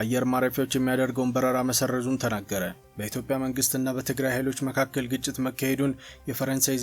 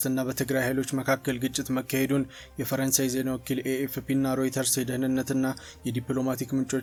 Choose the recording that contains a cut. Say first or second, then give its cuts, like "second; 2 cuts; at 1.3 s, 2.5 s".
first; 1 cut; at 2.8 s